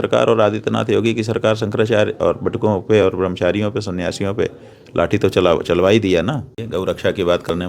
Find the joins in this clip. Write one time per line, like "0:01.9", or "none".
0:06.6